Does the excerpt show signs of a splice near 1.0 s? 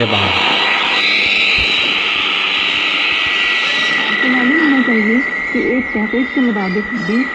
yes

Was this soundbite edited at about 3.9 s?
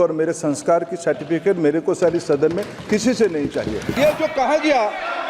yes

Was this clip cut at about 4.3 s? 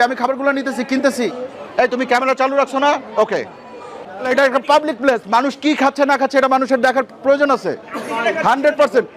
yes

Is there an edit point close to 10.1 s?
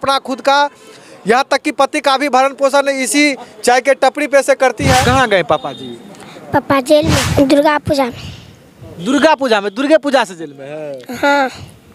no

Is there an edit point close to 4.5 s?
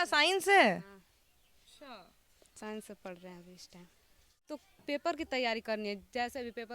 yes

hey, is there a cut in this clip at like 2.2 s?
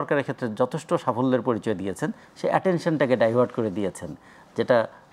no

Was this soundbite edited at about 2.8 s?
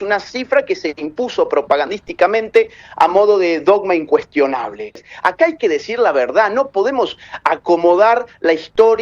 no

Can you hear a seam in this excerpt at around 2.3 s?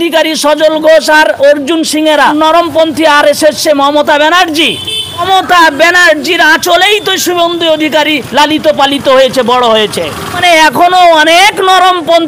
yes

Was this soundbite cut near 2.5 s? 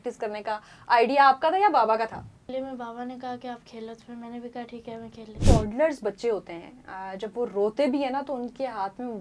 yes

